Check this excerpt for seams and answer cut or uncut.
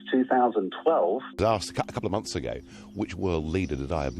cut